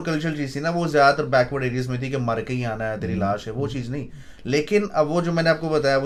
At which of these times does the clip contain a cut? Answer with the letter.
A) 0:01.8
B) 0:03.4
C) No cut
C